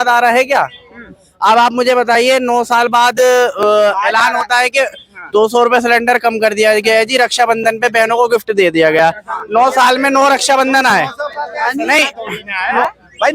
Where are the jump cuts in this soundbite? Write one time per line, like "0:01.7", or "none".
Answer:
none